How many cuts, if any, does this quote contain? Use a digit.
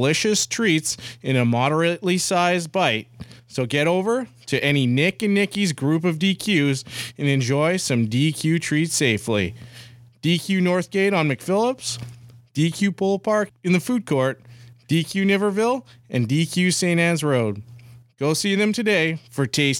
1